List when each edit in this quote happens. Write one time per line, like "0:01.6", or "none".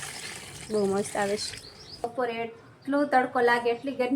0:02.0